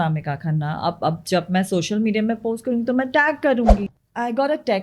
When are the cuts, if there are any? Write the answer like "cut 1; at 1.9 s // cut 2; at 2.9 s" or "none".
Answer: cut 1; at 3.9 s

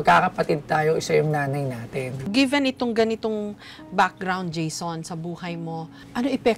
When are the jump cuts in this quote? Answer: cut 1; at 2.2 s

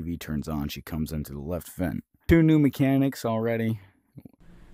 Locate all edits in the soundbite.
cut 1; at 2.1 s

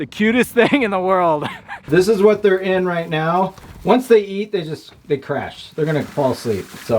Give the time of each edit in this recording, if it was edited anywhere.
cut 1; at 1.8 s

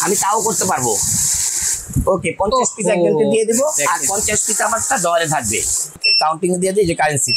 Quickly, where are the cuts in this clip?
cut 1; at 6.0 s

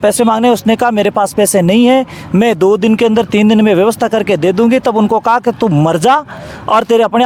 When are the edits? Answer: none

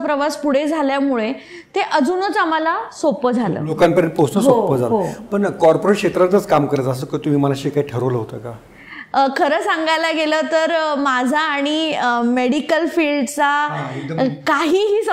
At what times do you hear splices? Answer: none

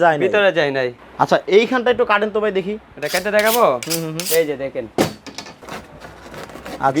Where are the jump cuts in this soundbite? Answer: cut 1; at 1.0 s // cut 2; at 5.6 s

